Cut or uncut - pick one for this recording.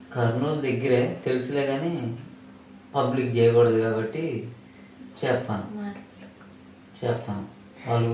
uncut